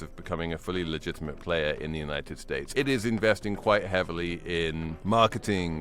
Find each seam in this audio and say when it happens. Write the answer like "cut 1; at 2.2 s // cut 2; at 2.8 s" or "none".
cut 1; at 2.5 s // cut 2; at 4.9 s